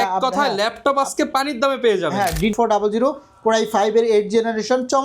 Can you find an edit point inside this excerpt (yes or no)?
yes